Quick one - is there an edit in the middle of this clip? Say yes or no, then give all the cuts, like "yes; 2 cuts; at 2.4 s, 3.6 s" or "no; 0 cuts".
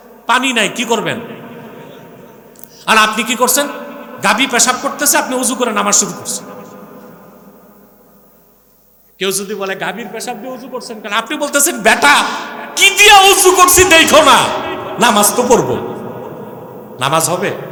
no; 0 cuts